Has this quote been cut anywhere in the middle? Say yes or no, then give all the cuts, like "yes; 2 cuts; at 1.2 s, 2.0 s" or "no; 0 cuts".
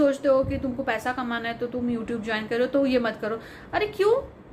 no; 0 cuts